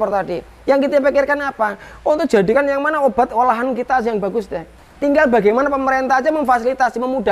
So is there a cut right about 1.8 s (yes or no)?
no